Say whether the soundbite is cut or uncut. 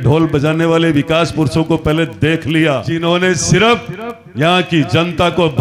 cut